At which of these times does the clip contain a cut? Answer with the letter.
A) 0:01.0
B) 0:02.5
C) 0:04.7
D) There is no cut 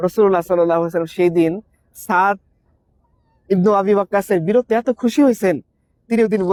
D